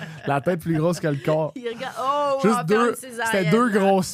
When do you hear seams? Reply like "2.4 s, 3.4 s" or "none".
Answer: none